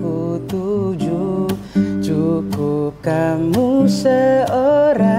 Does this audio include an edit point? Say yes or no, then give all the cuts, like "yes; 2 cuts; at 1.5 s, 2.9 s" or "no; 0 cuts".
no; 0 cuts